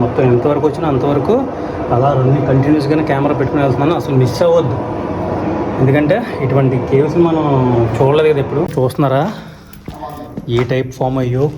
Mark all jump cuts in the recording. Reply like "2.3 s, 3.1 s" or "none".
8.7 s